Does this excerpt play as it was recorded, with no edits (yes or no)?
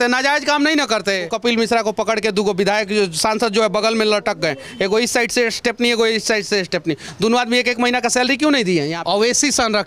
no